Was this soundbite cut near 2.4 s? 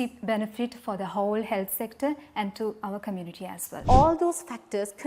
no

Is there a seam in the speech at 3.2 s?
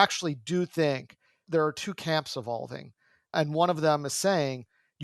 no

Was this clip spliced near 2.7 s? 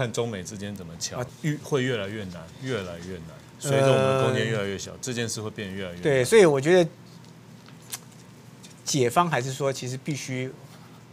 no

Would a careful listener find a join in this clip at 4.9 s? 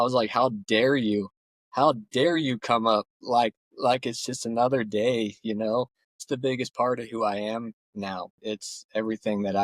no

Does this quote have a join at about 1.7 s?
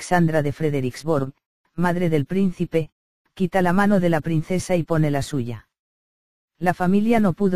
yes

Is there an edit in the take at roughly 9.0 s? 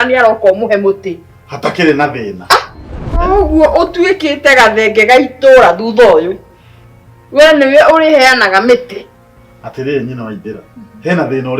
no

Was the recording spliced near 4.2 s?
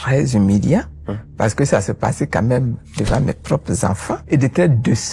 yes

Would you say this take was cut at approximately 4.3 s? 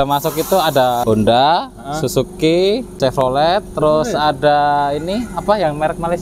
no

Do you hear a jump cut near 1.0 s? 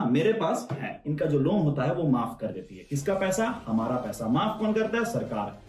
yes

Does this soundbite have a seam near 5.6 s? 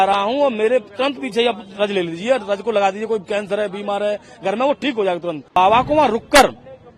yes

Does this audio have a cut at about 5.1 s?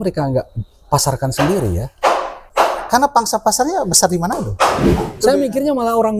yes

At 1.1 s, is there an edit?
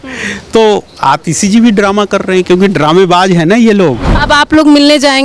no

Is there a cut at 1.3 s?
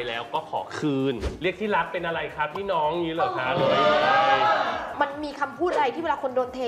yes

